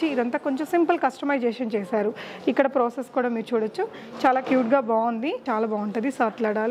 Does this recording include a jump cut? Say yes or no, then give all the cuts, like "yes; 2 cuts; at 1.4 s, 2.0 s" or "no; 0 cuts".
yes; 1 cut; at 5.4 s